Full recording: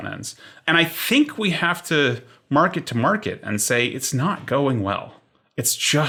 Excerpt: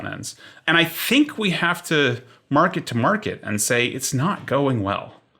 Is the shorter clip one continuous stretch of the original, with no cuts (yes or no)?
yes